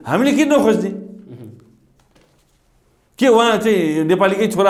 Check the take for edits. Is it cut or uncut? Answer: uncut